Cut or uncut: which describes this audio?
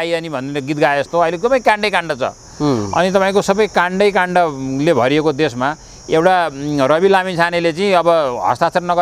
uncut